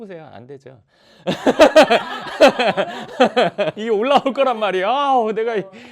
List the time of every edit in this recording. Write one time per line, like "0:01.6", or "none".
0:03.8